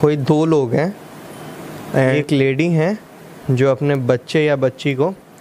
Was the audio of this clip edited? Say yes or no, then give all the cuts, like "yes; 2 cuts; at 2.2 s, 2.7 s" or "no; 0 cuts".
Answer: yes; 1 cut; at 2.1 s